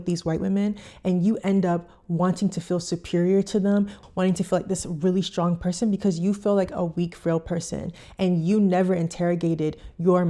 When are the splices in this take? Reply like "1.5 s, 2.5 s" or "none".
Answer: 4.0 s